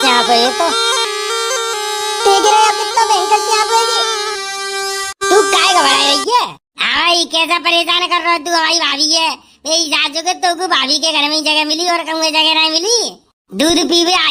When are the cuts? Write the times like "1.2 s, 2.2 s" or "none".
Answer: 1.0 s

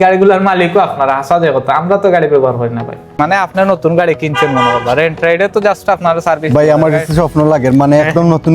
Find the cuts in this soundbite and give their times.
3.1 s

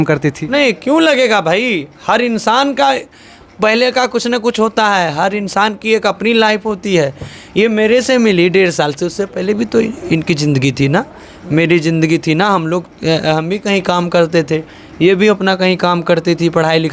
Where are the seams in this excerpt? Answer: none

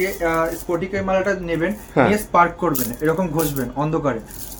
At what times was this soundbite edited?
none

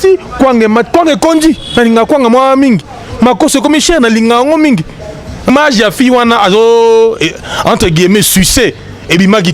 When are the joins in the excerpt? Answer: 5.5 s

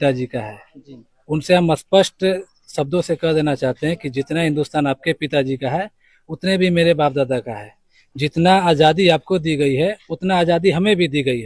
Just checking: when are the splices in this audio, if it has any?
none

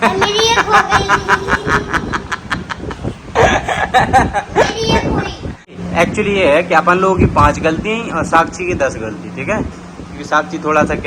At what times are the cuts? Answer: none

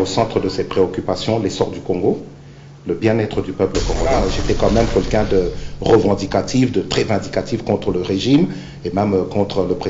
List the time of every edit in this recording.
4.3 s

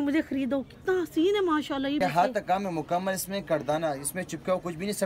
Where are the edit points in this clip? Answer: 2.0 s

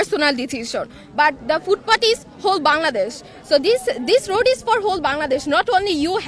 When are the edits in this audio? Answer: none

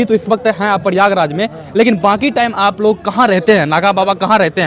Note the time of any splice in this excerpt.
none

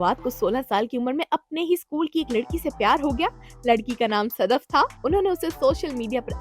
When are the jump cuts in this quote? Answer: none

